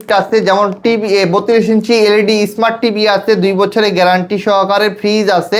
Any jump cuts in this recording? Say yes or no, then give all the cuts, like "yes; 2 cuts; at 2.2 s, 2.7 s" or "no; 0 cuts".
no; 0 cuts